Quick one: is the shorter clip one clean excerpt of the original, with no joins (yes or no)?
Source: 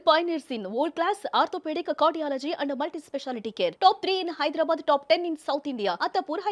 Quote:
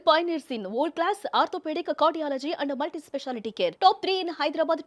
yes